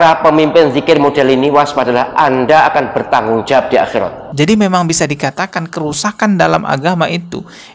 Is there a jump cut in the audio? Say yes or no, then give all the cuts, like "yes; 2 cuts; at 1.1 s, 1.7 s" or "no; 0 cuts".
yes; 1 cut; at 4.2 s